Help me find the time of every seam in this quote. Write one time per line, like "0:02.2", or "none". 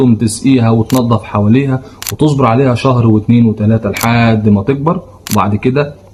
none